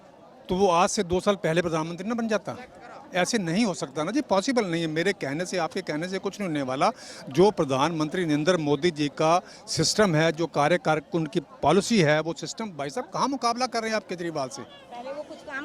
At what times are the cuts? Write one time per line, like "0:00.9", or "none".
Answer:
none

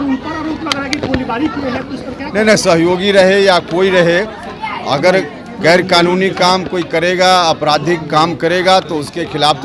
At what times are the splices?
none

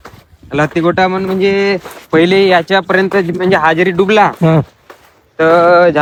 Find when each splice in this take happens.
none

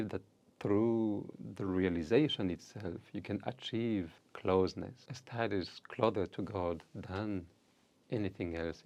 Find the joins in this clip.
none

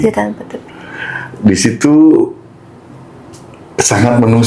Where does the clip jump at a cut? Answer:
none

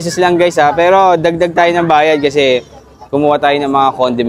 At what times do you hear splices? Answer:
none

